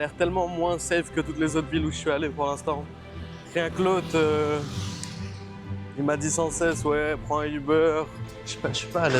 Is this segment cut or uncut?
cut